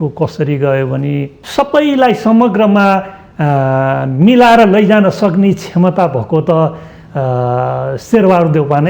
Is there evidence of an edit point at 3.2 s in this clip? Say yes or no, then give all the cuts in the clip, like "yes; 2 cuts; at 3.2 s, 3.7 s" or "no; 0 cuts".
no; 1 cut; at 1.4 s